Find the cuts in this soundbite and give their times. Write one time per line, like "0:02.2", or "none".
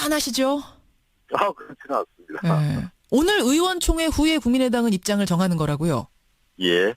0:04.6